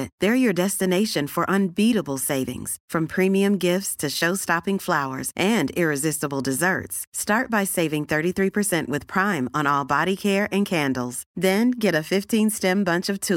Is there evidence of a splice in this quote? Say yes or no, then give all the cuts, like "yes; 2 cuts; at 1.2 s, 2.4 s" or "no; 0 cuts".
no; 0 cuts